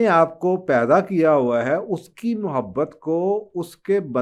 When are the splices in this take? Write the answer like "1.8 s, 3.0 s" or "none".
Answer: none